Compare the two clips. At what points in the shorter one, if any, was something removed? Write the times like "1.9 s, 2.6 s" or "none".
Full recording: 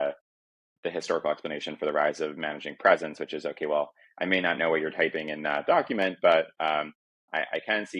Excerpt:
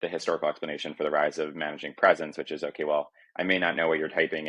none